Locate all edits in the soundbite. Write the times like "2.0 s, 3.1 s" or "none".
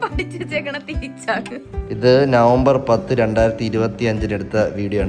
1.7 s